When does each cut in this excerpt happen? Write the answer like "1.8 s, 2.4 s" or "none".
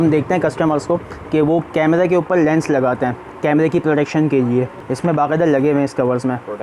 4.8 s